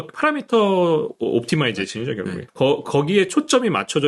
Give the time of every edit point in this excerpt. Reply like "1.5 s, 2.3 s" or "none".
2.4 s